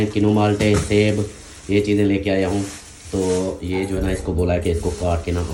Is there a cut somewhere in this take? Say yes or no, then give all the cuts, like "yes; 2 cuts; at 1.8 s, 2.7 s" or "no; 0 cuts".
no; 0 cuts